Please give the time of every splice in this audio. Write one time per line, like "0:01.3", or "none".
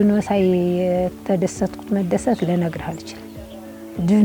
none

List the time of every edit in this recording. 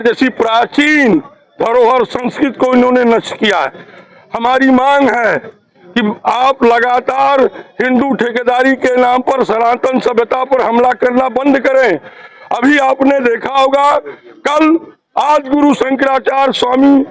none

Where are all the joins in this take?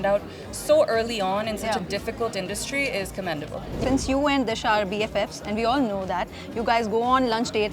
0:03.8

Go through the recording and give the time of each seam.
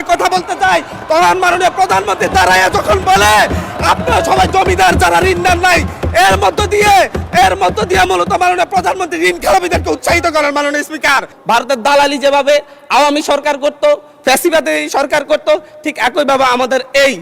0:11.3

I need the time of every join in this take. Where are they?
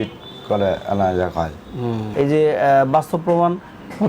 0:02.1

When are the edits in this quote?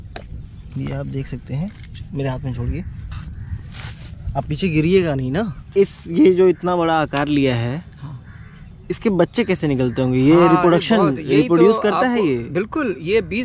0:05.6

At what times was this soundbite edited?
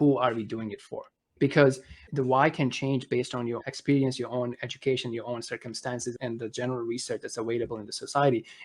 0:01.3
0:02.0
0:03.6
0:06.2

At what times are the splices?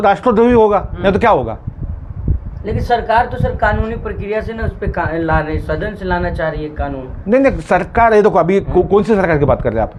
none

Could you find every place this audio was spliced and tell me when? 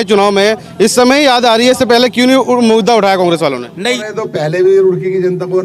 0:04.0

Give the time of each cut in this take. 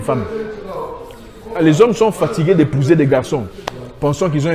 none

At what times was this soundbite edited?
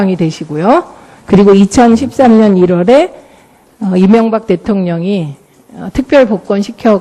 none

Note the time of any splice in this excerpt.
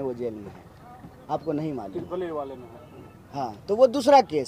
none

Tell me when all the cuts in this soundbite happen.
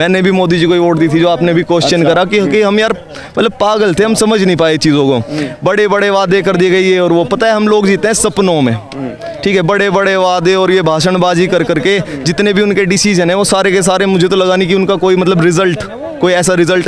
none

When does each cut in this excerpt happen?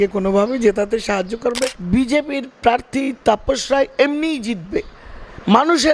0:01.7

